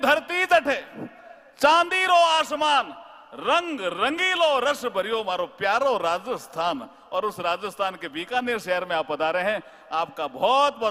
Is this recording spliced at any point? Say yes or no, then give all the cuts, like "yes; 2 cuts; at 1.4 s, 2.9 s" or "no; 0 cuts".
no; 0 cuts